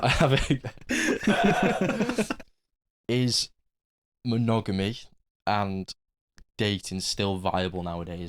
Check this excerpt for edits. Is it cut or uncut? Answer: cut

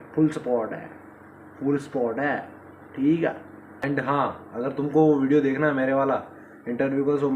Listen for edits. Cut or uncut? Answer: cut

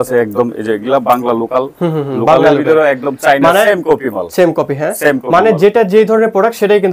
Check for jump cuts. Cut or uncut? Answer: uncut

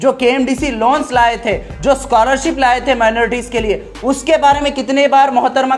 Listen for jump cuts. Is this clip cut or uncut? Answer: uncut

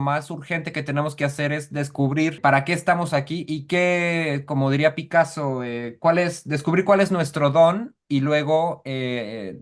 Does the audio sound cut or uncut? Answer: cut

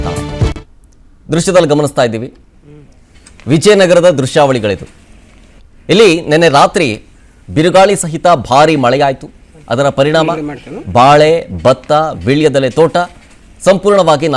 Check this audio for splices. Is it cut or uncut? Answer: uncut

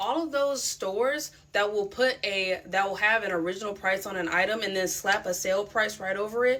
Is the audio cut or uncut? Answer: uncut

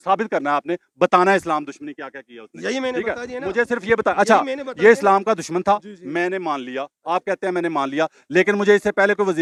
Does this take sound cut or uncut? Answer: uncut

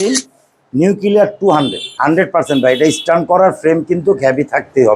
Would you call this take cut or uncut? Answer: cut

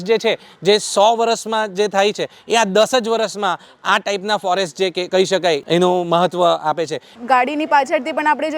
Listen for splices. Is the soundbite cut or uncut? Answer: cut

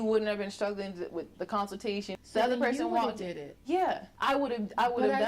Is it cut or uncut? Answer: cut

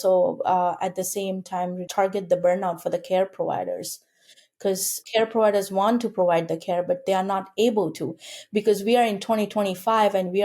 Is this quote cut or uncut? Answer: cut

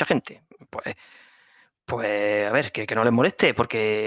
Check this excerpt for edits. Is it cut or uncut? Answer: uncut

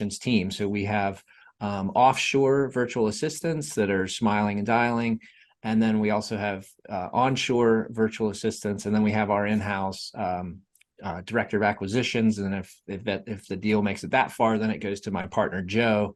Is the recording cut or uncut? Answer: uncut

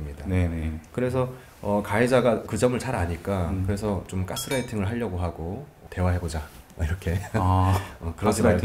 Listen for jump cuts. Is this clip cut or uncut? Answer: uncut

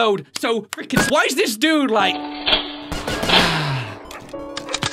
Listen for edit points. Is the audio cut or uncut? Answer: uncut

